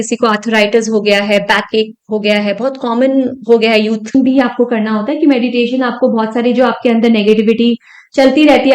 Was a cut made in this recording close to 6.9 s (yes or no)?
no